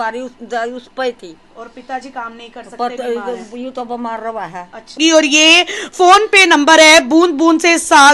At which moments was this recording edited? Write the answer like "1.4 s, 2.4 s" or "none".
5.0 s